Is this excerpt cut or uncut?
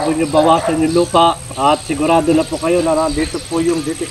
cut